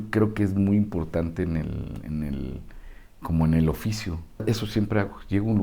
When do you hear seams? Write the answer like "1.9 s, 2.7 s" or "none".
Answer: 4.4 s